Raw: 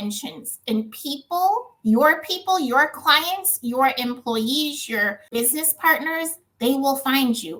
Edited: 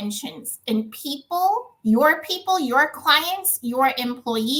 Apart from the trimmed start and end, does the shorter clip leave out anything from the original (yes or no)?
no